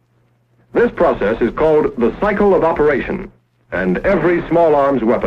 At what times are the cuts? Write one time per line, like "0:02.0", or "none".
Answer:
0:04.2